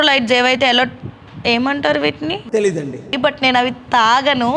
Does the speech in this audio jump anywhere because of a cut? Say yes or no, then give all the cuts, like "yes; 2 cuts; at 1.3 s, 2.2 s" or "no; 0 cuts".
yes; 1 cut; at 3.2 s